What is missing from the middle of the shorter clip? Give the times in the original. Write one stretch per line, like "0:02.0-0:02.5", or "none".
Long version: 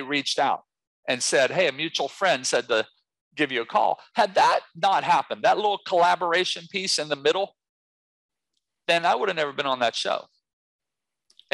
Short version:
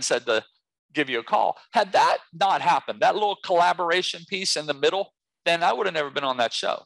0:07.7-0:08.7

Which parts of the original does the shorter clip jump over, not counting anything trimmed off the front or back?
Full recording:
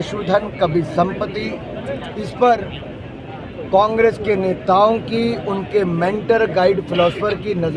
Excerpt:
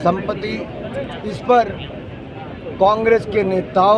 none

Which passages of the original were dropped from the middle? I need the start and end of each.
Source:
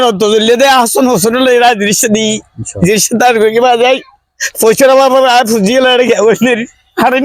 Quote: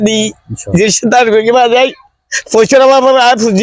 none

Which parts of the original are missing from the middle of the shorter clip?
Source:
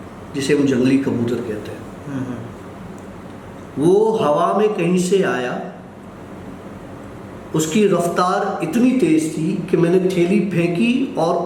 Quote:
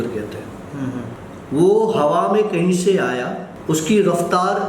0:02.5-0:03.5
0:05.7-0:07.3

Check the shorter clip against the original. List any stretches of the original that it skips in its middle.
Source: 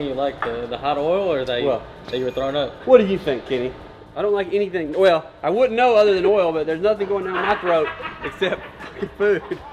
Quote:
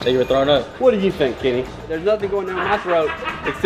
0:04.0-0:06.7

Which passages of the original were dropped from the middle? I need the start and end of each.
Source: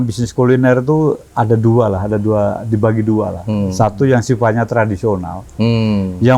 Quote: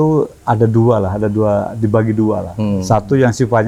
none

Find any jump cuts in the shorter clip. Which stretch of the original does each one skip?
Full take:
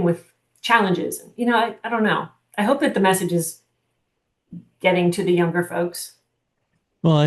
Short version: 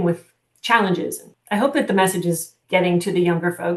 0:01.3-0:02.3
0:03.6-0:04.6

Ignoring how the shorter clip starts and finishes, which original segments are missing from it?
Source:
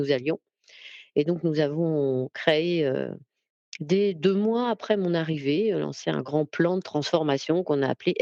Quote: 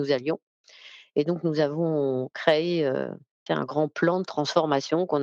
0:03.4-0:06.0

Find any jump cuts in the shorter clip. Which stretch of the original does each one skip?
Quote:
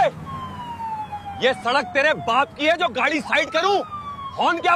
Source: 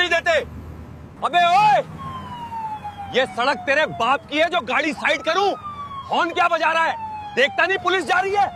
none

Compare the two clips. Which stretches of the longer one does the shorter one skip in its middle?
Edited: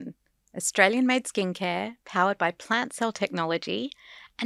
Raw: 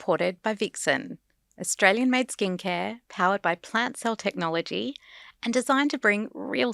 none

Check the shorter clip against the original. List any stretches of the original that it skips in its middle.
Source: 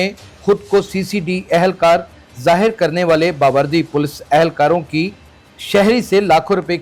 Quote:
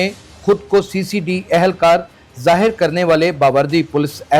none

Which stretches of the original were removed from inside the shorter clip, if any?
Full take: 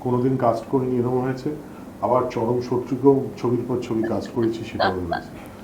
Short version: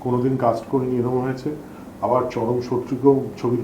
none

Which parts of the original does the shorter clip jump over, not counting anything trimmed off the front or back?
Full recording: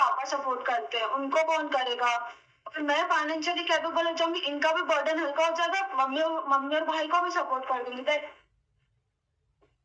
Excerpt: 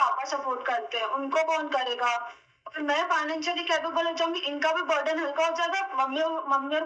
none

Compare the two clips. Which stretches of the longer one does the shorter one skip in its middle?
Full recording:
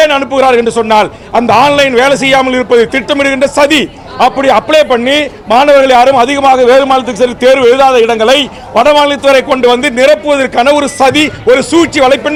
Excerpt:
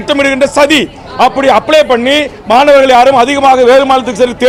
none

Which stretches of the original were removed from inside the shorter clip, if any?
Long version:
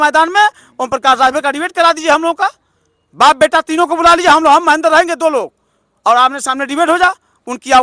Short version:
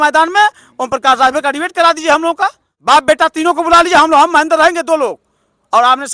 0:02.7-0:03.0

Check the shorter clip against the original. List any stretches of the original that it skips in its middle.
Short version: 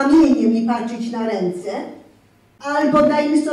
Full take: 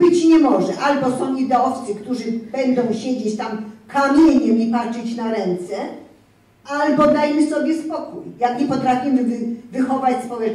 none

